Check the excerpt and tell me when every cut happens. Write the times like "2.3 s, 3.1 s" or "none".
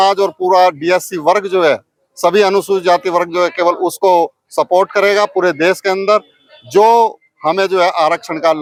none